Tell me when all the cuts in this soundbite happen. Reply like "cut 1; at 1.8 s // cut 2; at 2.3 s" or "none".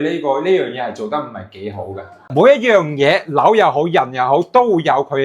cut 1; at 2.3 s